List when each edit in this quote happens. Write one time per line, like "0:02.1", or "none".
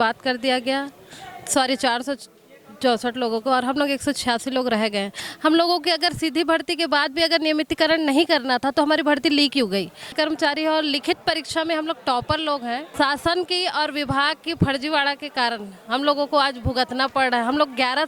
0:10.1
0:12.9